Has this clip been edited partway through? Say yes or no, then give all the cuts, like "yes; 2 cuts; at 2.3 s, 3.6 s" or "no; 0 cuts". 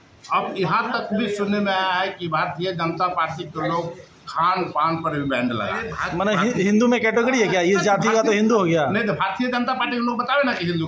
yes; 1 cut; at 5.9 s